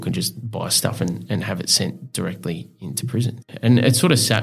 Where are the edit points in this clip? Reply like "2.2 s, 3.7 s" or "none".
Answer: 3.4 s

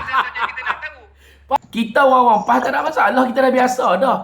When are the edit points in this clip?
1.6 s

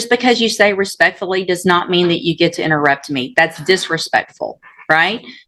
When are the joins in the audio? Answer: none

